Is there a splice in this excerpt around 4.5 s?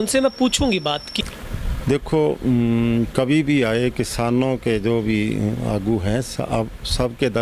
no; 1 cut; at 1.1 s

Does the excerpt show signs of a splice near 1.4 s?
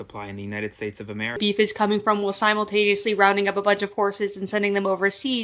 yes; 1 cut; at 1.4 s

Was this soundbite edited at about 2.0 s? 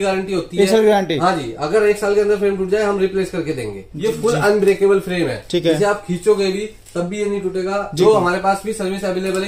no; 2 cuts; at 3.9 s, 7.9 s

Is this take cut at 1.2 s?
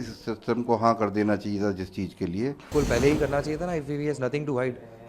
no; 1 cut; at 2.7 s

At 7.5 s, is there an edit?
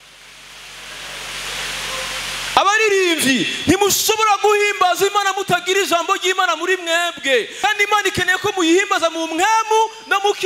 yes; 1 cut; at 7.5 s

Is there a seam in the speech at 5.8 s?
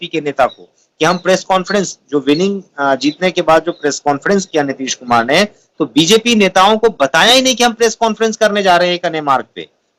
no; 0 cuts

